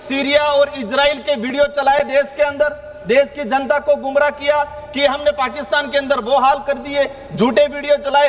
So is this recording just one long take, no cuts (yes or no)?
yes